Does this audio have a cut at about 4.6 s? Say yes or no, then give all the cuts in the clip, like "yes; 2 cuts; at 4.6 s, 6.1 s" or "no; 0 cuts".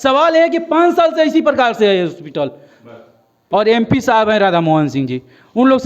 no; 1 cut; at 3.4 s